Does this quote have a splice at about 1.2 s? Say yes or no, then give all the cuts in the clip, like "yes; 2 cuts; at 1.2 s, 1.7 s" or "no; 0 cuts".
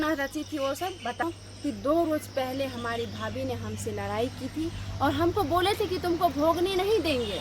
yes; 1 cut; at 1.2 s